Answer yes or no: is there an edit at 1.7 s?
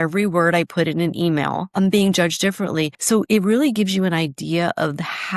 yes